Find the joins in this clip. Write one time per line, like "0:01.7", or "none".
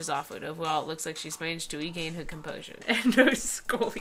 none